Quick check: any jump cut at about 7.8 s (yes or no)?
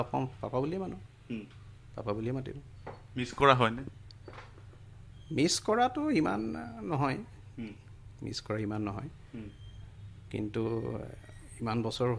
no